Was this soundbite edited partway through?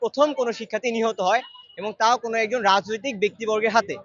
no; 0 cuts

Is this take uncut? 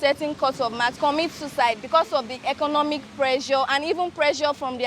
no; 1 cut; at 0.9 s

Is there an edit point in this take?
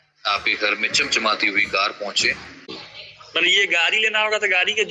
yes; 1 cut; at 2.7 s

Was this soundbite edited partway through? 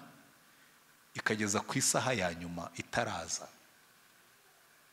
no; 0 cuts

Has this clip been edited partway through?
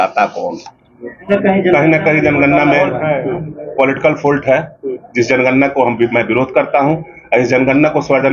yes; 1 cut; at 1.3 s

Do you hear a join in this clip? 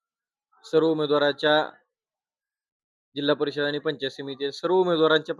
no; 0 cuts

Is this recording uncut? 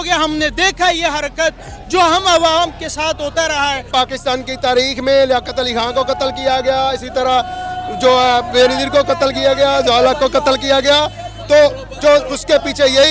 no; 1 cut; at 3.9 s

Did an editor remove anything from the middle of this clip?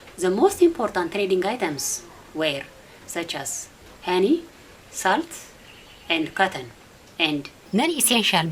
yes; 1 cut; at 7.6 s

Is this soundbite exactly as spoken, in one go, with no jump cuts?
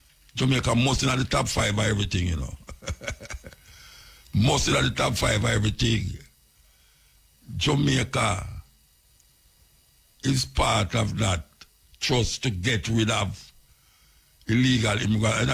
yes; 0 cuts

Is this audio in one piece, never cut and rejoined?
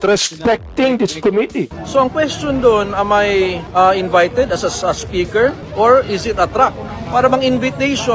no; 3 cuts; at 1.8 s, 5.6 s, 7.0 s

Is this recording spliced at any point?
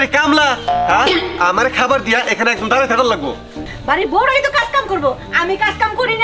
yes; 1 cut; at 3.7 s

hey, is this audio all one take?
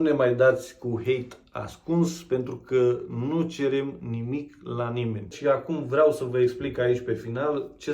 no; 1 cut; at 5.4 s

